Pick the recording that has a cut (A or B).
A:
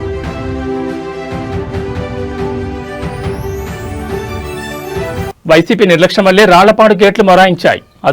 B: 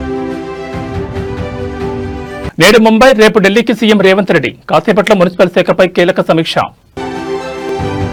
A